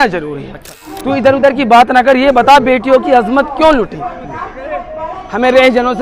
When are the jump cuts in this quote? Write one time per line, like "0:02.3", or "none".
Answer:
0:01.0